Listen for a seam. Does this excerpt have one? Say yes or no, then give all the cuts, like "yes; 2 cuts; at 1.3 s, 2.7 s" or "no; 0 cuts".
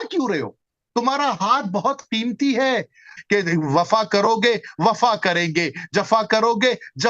yes; 1 cut; at 3.1 s